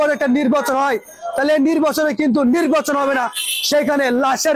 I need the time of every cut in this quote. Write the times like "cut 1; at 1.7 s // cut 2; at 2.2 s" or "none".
none